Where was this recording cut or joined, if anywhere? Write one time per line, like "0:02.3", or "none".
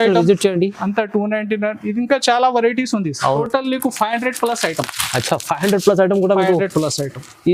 0:03.4